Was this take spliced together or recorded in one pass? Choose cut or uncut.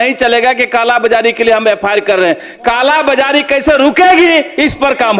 uncut